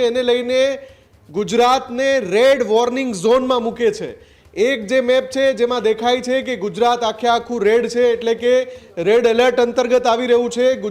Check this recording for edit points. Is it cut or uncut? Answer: uncut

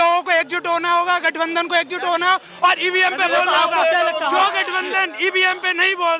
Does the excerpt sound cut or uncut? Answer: uncut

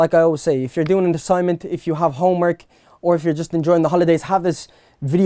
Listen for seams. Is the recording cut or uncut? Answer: uncut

